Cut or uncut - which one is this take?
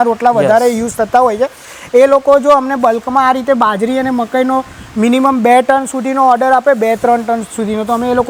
uncut